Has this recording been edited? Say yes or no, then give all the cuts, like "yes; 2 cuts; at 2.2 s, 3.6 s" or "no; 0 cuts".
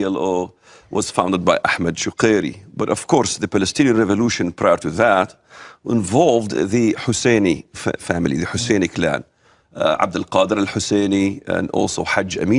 yes; 1 cut; at 5.2 s